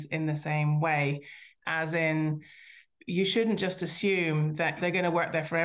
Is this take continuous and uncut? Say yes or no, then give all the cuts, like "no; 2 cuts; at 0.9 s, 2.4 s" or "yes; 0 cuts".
no; 1 cut; at 4.8 s